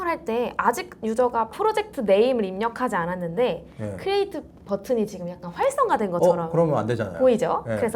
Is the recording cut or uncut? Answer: uncut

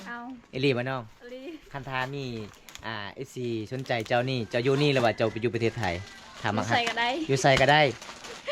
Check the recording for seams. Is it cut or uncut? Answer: uncut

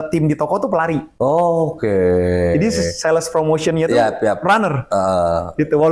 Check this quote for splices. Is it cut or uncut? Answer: cut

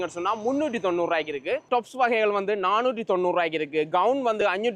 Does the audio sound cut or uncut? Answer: uncut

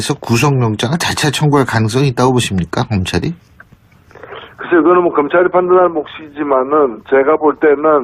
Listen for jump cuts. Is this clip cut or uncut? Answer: uncut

